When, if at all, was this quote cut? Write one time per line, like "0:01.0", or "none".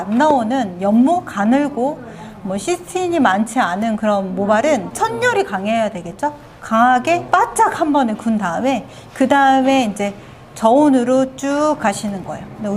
0:04.9
0:07.2